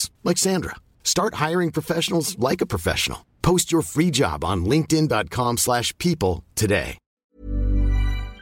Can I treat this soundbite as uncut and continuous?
no; 1 cut; at 7.2 s

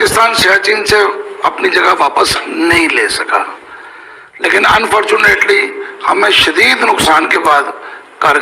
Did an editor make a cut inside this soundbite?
no; 0 cuts

